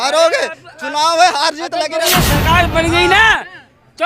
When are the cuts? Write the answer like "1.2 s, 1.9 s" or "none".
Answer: 2.1 s